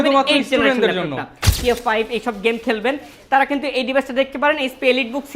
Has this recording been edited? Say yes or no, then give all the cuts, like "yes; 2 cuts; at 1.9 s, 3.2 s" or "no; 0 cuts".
yes; 1 cut; at 1.5 s